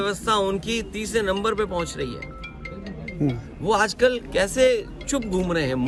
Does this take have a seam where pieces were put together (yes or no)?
no